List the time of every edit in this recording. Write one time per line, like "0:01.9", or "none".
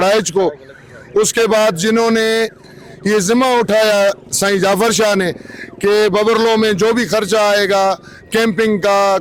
none